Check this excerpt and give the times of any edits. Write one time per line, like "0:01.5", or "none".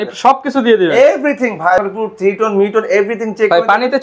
0:01.8